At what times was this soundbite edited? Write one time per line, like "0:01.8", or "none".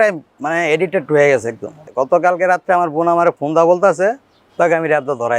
0:01.8